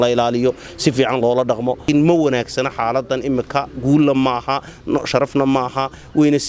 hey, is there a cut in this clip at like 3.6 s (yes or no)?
no